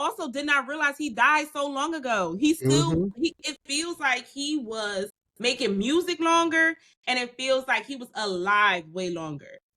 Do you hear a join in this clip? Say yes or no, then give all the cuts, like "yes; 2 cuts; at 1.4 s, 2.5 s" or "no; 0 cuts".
yes; 1 cut; at 5.2 s